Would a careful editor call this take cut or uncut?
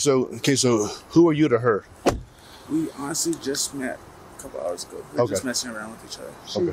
uncut